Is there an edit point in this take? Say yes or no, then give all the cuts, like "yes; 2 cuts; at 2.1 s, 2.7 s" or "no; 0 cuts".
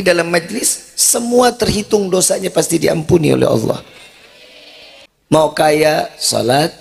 yes; 1 cut; at 5.0 s